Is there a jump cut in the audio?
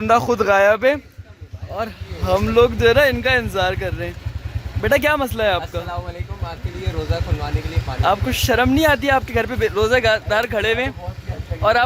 no; 0 cuts

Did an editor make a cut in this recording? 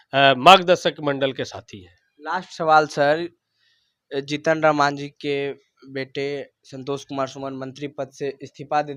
no; 0 cuts

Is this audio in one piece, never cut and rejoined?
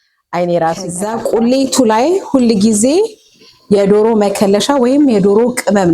no; 1 cut; at 1.0 s

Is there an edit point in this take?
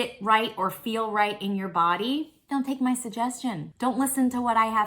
yes; 2 cuts; at 2.4 s, 3.7 s

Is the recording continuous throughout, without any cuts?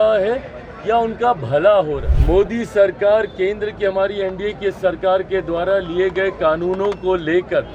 no; 1 cut; at 2.1 s

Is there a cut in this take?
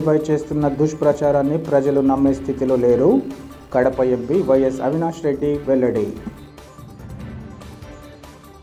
no; 0 cuts

